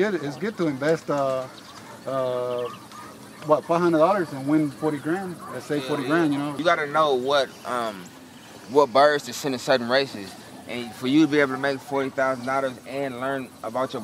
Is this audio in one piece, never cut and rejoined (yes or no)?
yes